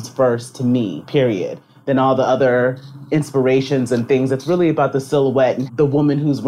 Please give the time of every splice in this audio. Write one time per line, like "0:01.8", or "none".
0:01.0
0:05.6